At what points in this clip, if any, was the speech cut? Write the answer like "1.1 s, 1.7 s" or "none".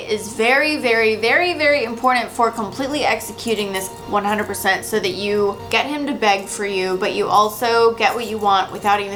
none